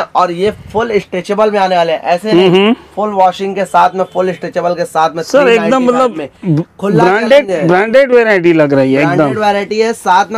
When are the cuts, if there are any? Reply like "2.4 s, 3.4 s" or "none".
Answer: none